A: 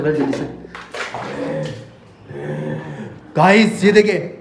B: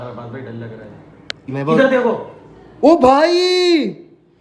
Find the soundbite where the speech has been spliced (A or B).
B